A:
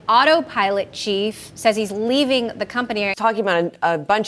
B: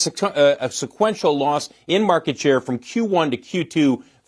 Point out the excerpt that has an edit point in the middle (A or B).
A